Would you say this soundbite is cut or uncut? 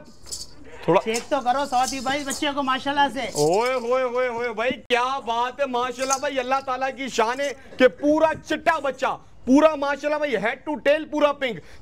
uncut